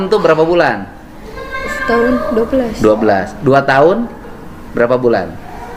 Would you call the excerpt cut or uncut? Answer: uncut